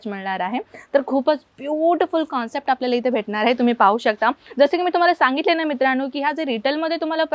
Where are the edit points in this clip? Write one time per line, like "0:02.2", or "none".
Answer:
none